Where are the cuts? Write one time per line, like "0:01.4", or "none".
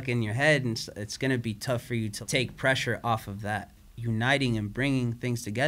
0:02.2
0:03.8